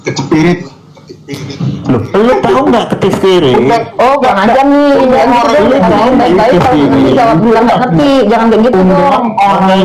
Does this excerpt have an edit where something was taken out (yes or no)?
no